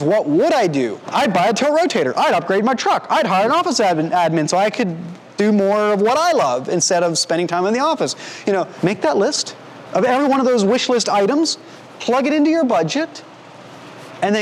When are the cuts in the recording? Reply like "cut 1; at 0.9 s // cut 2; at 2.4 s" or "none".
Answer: none